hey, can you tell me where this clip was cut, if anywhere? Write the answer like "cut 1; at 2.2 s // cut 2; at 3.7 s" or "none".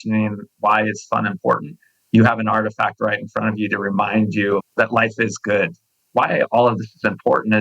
cut 1; at 6.0 s